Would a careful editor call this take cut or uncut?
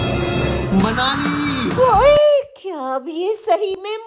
uncut